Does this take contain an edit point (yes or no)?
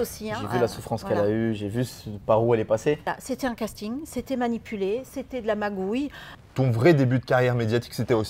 yes